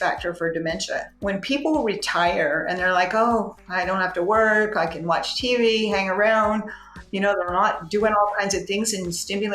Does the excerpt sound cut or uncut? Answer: cut